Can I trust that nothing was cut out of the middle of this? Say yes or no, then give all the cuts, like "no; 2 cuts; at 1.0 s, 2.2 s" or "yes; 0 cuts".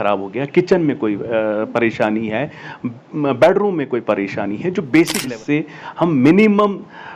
no; 1 cut; at 5.3 s